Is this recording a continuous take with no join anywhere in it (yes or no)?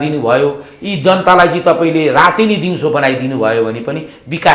yes